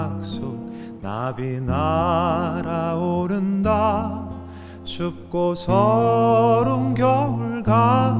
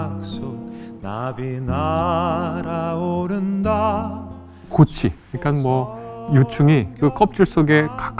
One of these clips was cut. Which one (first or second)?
second